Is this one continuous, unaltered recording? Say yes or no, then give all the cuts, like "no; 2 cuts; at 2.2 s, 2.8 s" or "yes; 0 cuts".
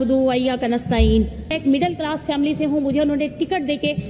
yes; 0 cuts